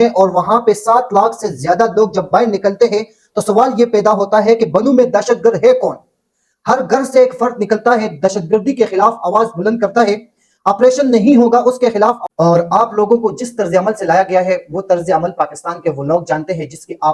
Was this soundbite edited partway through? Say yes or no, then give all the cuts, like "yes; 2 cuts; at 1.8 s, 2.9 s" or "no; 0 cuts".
yes; 1 cut; at 12.2 s